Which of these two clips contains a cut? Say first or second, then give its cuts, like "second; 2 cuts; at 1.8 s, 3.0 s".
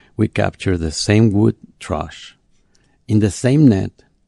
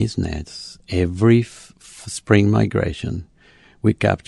first; 1 cut; at 1.7 s